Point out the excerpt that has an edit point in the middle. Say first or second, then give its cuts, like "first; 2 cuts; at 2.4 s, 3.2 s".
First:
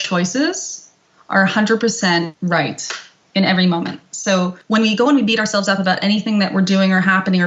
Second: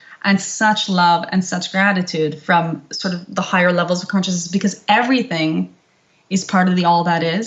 first; 2 cuts; at 2.3 s, 4.6 s